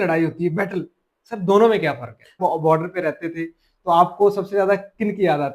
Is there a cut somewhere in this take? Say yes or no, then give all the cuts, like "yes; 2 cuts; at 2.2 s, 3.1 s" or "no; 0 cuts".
yes; 1 cut; at 2.4 s